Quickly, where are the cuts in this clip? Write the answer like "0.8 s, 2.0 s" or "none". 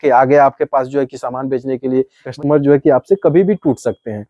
2.3 s